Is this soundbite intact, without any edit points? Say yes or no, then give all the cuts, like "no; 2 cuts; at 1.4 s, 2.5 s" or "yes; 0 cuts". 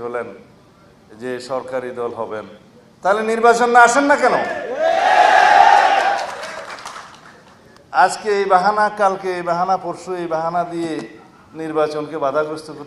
yes; 0 cuts